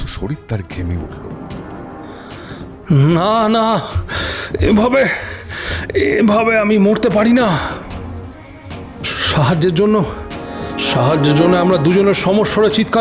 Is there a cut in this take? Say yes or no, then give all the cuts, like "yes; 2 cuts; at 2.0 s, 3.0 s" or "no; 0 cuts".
no; 0 cuts